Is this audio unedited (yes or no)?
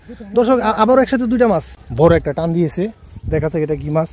no